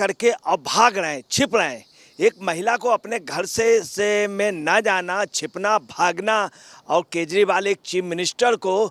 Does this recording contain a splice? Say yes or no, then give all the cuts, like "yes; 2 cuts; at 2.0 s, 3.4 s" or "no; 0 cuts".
no; 0 cuts